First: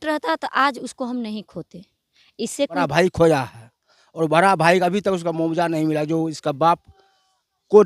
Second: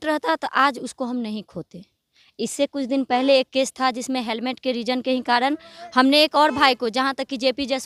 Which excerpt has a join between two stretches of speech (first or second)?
first